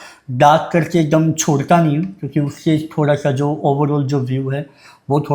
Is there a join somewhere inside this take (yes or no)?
no